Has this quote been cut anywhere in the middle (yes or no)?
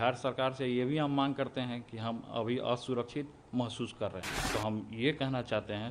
yes